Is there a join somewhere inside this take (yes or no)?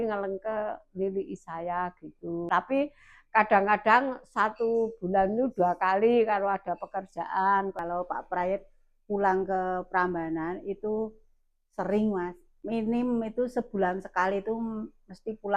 yes